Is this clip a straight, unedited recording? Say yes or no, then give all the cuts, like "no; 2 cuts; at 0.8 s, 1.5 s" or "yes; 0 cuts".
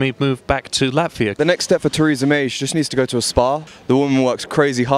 no; 2 cuts; at 1.4 s, 3.7 s